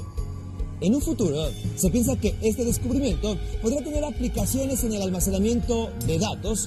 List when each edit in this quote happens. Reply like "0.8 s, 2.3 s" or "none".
3.3 s